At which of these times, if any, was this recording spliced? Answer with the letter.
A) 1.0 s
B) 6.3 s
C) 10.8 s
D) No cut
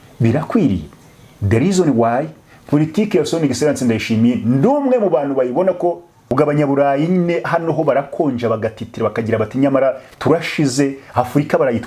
B